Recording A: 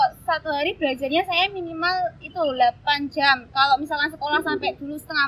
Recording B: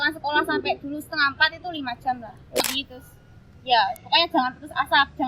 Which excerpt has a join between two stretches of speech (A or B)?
B